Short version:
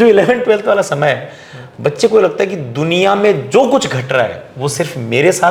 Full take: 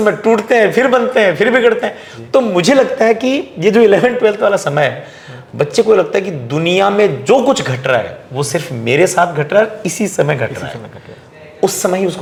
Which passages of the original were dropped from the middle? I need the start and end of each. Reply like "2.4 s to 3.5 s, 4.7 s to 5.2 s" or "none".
none